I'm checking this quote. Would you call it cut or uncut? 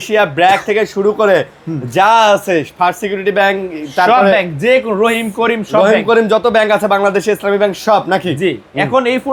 uncut